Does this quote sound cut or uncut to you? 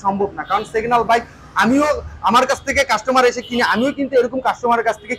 uncut